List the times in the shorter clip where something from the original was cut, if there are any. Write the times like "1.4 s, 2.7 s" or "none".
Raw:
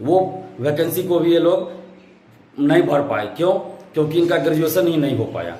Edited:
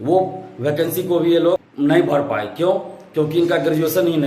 1.7 s